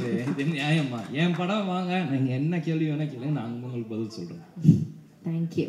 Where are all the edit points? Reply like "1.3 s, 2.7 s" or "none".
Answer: none